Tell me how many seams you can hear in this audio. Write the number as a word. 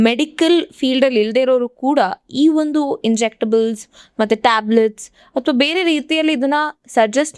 zero